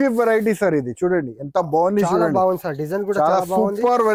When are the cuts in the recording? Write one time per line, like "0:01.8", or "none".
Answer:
none